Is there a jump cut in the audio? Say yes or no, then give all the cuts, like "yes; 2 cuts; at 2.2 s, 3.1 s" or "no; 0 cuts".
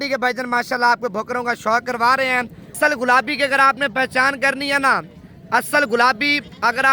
yes; 1 cut; at 2.7 s